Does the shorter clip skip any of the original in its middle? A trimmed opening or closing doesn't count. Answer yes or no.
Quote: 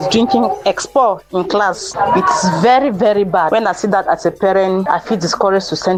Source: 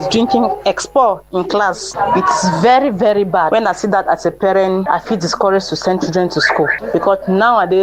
no